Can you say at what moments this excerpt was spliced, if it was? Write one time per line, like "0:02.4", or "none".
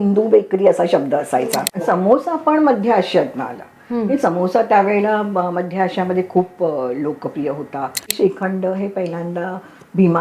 0:01.7
0:08.1